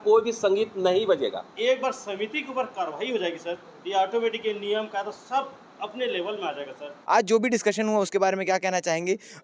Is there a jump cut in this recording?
yes; 2 cuts; at 1.5 s, 6.9 s

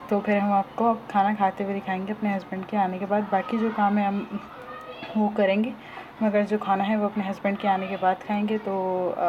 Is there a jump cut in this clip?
no; 0 cuts

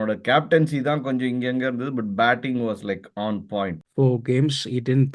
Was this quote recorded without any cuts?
no; 1 cut; at 3.8 s

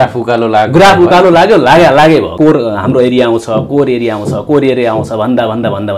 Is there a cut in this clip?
yes; 1 cut; at 2.3 s

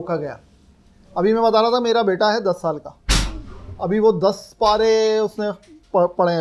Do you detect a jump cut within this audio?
no; 0 cuts

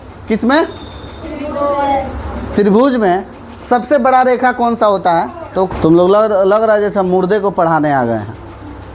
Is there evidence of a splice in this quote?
yes; 1 cut; at 5.7 s

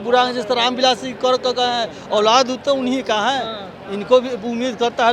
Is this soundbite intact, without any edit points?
yes; 0 cuts

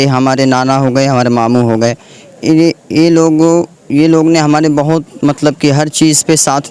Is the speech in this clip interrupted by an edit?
no; 0 cuts

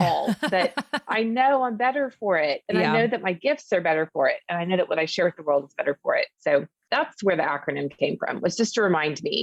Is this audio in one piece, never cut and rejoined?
yes; 0 cuts

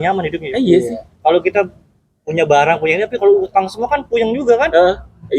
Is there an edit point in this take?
no; 0 cuts

